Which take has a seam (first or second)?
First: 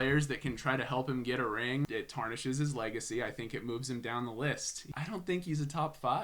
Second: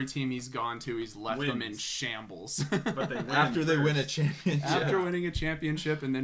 first